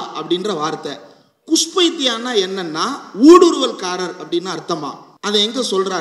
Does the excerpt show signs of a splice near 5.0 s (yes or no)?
yes